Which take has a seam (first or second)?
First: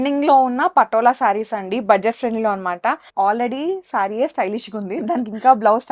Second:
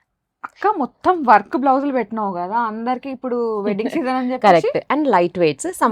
first